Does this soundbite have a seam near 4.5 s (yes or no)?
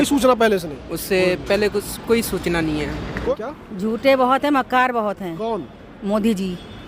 no